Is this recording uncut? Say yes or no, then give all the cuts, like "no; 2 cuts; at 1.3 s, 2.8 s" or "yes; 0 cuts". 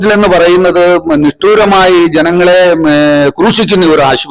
yes; 0 cuts